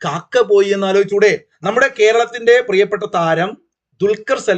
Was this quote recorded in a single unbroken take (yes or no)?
no